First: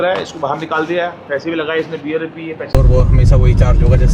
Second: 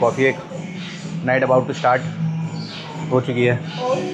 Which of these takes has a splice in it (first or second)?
first